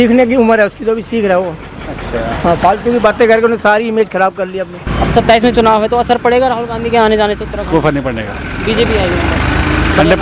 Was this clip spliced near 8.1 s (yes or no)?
no